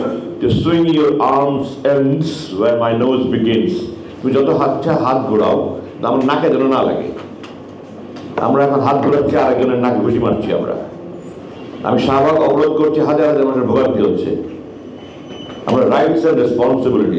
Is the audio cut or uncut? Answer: uncut